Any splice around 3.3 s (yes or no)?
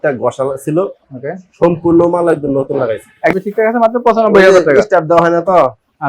yes